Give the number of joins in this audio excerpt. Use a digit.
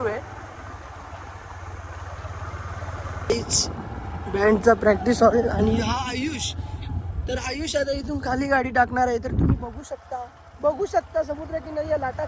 1